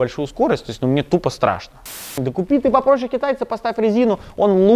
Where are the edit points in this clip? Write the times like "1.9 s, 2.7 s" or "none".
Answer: 2.1 s